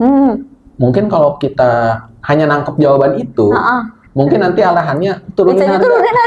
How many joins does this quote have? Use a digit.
1